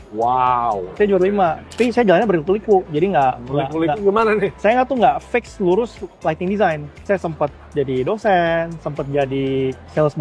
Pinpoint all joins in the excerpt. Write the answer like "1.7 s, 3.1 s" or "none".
1.6 s